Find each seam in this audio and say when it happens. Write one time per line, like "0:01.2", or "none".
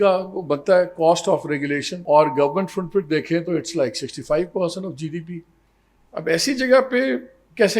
0:01.9

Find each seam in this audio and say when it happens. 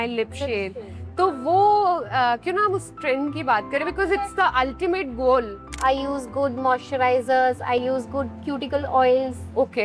0:05.8
0:07.8

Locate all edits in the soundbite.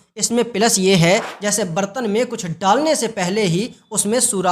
0:01.3

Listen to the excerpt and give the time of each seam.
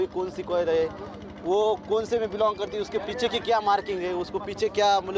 none

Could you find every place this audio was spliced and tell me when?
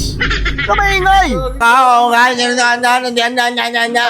0:01.6

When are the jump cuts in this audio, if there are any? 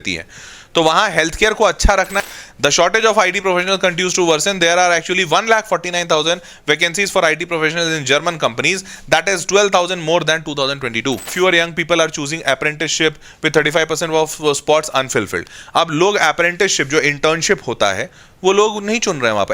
0:02.2
0:11.3

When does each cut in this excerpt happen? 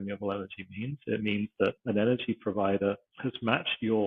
0:01.8
0:03.1

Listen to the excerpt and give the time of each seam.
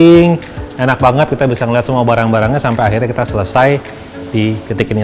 none

